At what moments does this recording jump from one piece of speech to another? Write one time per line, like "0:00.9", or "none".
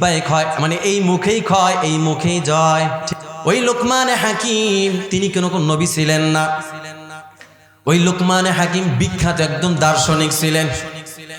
0:03.1